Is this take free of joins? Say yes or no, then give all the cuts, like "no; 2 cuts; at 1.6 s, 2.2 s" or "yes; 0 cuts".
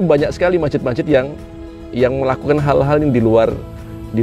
yes; 0 cuts